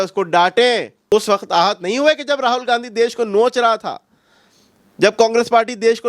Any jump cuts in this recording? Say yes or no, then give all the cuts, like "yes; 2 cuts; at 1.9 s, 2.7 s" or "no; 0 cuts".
yes; 1 cut; at 1.0 s